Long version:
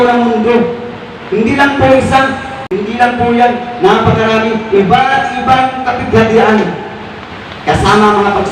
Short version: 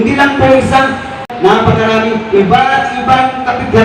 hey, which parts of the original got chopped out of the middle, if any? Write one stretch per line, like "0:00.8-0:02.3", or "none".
0:02.6-0:03.6